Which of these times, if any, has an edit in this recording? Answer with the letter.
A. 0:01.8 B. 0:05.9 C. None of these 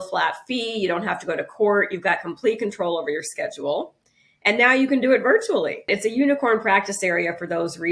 B